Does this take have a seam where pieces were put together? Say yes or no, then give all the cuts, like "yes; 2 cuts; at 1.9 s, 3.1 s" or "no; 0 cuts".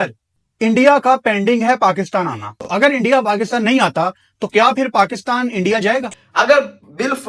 yes; 2 cuts; at 2.6 s, 6.2 s